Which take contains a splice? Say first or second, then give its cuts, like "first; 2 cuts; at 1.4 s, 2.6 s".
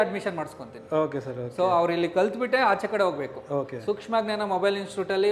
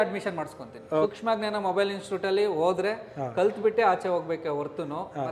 second; 1 cut; at 1.1 s